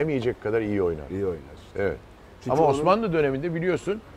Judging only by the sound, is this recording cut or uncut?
uncut